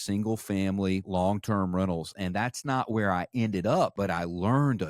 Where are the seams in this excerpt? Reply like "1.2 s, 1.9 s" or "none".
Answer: 1.0 s, 3.9 s